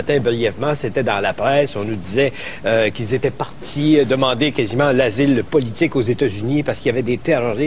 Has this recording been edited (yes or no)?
no